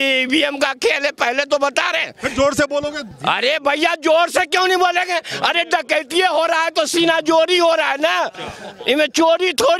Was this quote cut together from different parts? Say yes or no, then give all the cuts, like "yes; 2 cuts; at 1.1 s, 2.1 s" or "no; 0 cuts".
no; 0 cuts